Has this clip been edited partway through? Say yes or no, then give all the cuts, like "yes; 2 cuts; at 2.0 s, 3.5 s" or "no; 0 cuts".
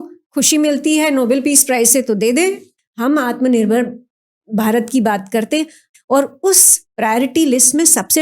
yes; 2 cuts; at 2.7 s, 5.9 s